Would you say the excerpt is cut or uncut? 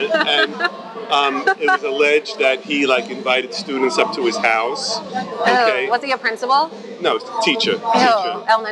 uncut